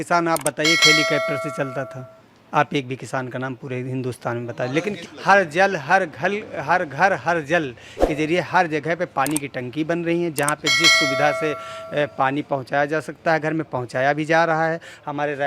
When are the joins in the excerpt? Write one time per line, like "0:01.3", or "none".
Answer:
none